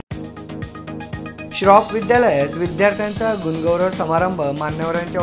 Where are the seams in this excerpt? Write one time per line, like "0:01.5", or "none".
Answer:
0:01.0